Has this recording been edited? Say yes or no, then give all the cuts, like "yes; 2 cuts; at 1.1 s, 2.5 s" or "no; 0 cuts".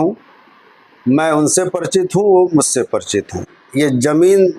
yes; 1 cut; at 3.6 s